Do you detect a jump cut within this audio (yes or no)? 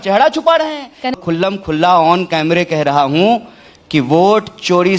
yes